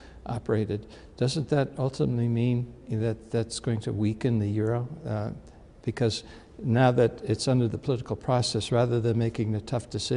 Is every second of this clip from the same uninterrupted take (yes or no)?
yes